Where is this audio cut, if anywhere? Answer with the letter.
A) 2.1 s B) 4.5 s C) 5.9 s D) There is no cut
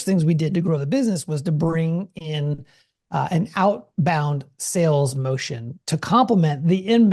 D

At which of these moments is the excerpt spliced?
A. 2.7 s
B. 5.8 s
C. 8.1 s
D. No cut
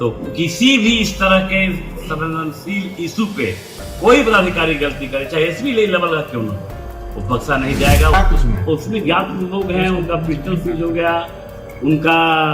C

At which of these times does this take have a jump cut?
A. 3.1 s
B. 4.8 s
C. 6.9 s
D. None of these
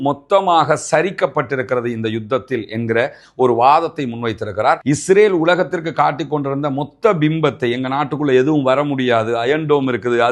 B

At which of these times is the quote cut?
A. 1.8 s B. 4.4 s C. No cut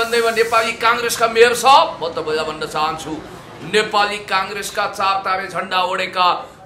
C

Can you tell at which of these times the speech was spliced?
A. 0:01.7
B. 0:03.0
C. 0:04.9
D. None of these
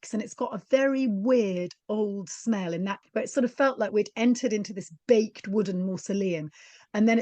B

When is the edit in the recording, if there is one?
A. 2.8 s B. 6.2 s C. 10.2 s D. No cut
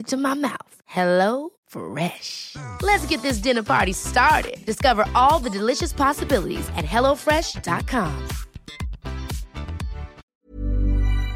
C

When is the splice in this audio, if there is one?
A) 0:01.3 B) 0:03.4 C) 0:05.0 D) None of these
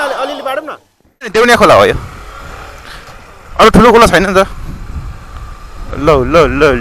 A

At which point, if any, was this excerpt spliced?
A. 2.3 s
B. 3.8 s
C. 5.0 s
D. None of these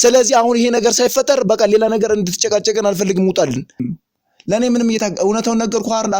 B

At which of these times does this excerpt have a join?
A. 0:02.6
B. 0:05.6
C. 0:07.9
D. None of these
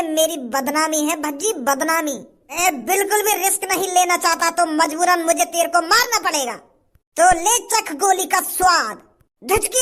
A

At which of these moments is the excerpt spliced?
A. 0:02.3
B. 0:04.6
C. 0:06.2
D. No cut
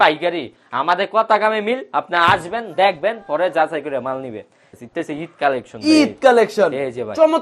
B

